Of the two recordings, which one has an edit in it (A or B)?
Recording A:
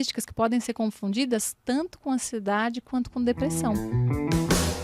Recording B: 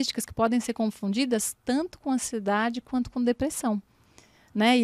A